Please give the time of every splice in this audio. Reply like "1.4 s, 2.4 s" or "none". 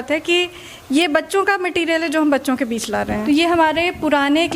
3.2 s